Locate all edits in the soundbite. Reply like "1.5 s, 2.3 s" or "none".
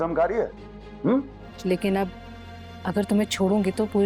1.4 s